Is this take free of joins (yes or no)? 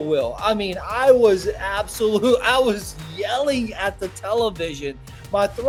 yes